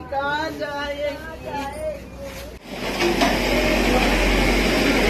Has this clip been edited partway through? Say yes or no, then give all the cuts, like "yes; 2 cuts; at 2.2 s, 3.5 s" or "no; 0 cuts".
no; 0 cuts